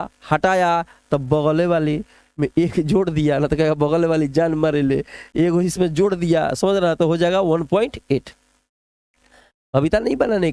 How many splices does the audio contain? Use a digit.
0